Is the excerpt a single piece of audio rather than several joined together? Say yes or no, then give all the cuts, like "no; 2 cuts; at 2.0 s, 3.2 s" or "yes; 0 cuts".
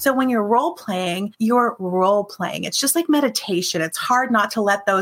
no; 1 cut; at 1.3 s